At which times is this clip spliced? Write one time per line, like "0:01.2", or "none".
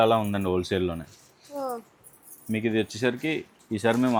none